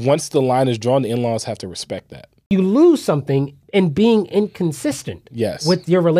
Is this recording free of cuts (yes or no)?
no